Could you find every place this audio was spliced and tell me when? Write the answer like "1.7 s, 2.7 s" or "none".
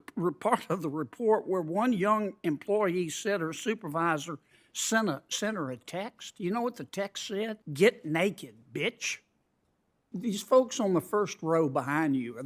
7.6 s, 10.1 s